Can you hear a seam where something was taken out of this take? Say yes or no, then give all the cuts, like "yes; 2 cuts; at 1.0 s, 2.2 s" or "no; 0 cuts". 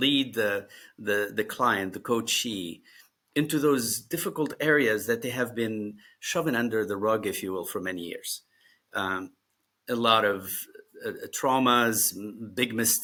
no; 0 cuts